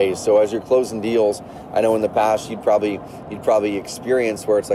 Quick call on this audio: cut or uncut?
uncut